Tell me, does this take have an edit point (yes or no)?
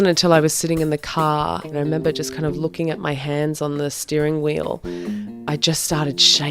yes